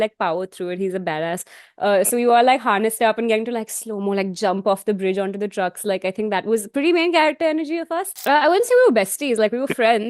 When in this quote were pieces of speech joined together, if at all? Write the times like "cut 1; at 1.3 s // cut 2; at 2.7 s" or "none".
cut 1; at 8.1 s